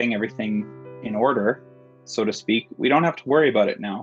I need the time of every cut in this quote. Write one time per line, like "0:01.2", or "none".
none